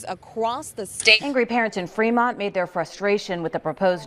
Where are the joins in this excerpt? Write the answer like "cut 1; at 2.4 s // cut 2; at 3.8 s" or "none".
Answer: cut 1; at 1.2 s